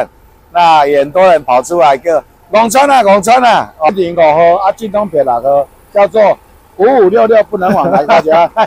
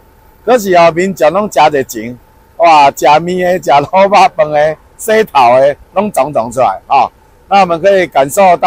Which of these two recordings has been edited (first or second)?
first